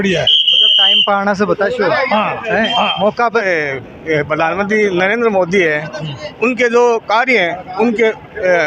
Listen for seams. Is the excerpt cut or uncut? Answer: cut